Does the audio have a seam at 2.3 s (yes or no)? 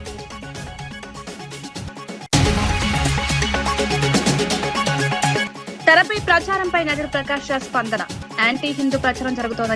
yes